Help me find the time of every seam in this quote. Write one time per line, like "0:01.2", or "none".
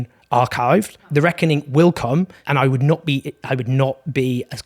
0:01.0
0:02.4

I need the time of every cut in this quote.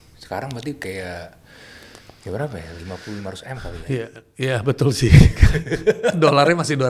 none

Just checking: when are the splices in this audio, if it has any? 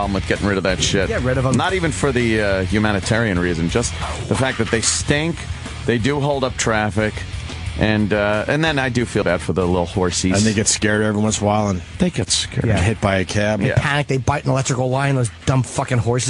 0:12.0

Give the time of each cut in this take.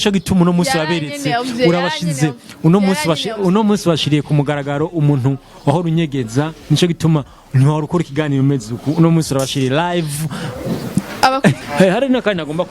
0:11.6

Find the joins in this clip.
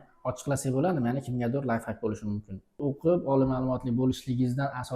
0:02.7

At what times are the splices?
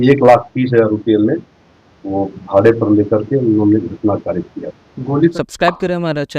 0:05.3

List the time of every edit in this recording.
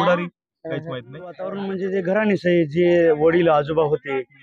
0:01.6

